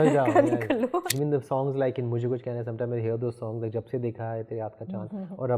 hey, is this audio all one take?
no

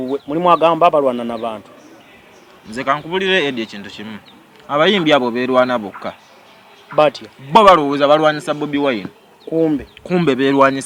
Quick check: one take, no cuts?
yes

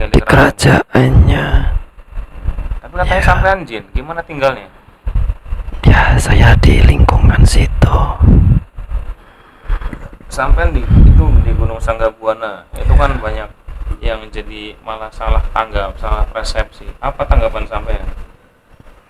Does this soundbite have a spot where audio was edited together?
no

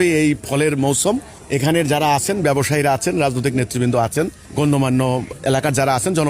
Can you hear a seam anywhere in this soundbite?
yes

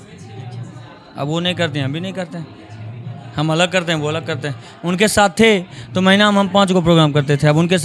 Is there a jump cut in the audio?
no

